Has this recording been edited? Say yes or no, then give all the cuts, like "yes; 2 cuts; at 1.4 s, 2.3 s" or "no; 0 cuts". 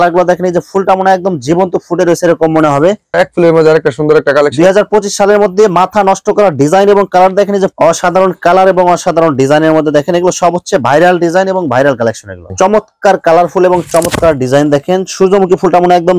yes; 3 cuts; at 3.0 s, 7.7 s, 12.5 s